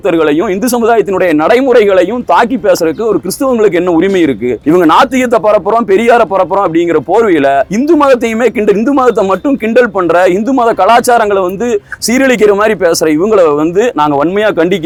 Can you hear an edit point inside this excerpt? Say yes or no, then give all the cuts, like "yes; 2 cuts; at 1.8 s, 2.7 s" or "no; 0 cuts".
no; 0 cuts